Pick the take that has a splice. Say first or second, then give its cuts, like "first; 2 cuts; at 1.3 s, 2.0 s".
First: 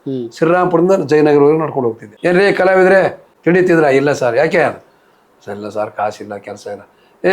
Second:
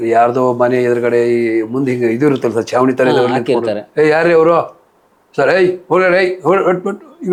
first; 2 cuts; at 2.1 s, 3.3 s